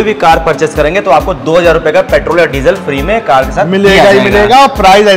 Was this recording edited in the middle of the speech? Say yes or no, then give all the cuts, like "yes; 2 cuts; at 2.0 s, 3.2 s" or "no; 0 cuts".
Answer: no; 0 cuts